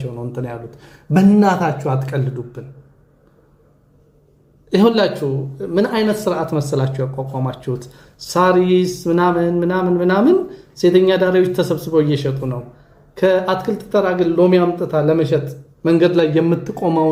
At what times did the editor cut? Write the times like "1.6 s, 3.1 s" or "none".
none